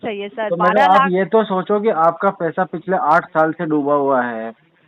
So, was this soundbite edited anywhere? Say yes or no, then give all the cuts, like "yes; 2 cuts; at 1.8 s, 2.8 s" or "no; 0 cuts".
no; 0 cuts